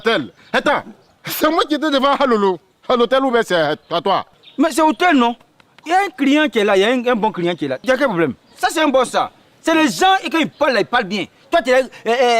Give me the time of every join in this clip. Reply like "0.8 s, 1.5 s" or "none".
8.4 s